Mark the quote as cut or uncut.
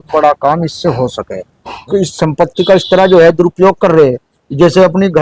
cut